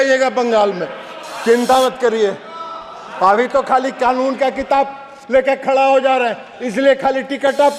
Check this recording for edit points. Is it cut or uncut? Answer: uncut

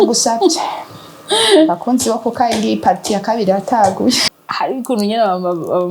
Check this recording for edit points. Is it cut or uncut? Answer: cut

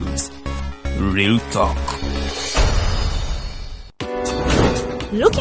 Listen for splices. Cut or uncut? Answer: cut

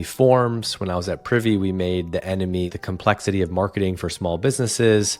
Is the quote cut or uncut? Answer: cut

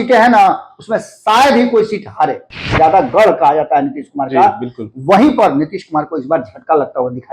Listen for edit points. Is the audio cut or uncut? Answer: cut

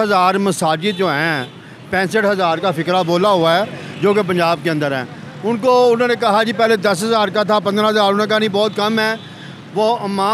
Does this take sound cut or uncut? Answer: uncut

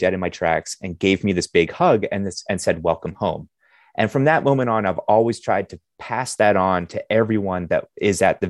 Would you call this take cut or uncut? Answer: uncut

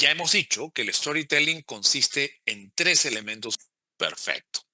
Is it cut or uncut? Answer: cut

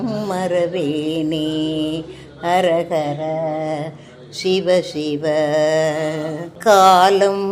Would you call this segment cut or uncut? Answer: cut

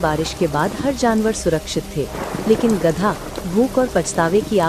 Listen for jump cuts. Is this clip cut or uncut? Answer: uncut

